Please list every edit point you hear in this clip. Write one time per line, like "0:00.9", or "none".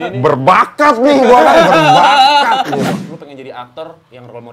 0:03.0